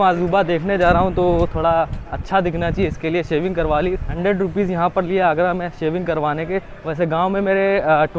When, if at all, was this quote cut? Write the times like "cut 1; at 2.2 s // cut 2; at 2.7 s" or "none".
none